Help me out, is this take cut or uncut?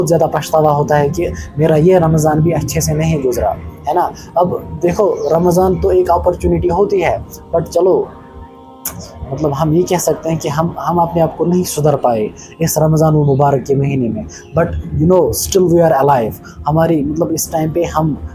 uncut